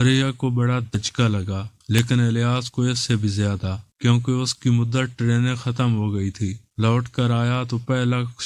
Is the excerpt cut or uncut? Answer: cut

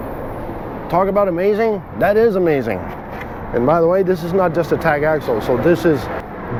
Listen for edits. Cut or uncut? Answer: uncut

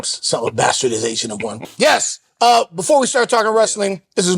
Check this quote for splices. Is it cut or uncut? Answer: cut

